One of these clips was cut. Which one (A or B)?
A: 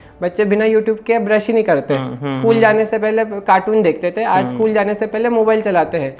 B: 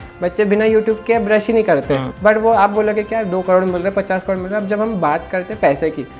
B